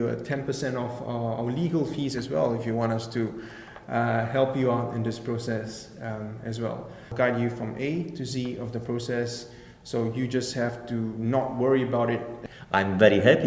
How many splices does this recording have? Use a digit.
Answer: 2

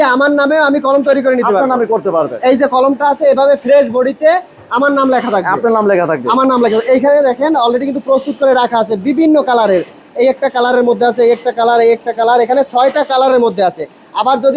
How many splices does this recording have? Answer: 0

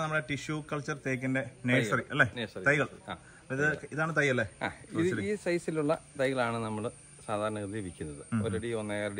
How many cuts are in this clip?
0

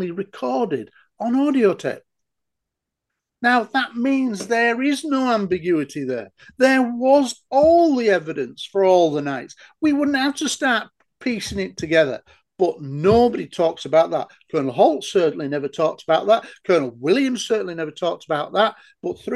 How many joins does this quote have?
0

